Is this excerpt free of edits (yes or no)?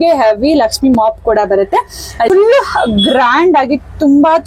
no